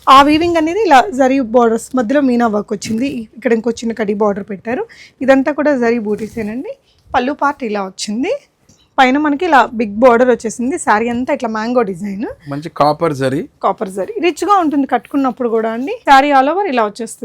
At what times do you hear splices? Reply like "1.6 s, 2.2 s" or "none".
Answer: 8.8 s, 16.0 s